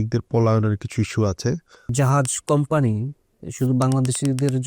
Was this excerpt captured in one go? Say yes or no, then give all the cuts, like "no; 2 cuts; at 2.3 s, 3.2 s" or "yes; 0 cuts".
no; 1 cut; at 1.8 s